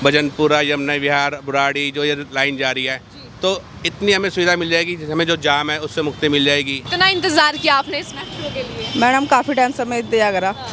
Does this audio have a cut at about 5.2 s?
no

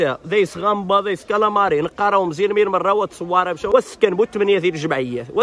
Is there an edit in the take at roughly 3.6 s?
yes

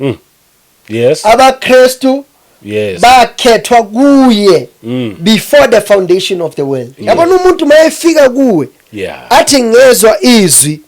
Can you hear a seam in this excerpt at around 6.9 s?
yes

